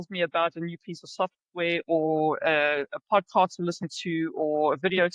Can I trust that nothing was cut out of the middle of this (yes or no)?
yes